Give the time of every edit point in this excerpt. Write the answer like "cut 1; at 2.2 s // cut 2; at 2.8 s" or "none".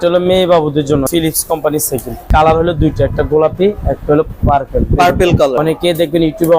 cut 1; at 1.1 s // cut 2; at 2.3 s // cut 3; at 5.6 s